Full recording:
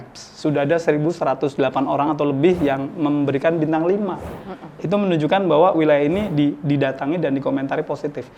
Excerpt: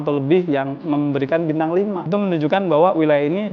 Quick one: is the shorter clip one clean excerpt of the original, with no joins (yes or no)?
no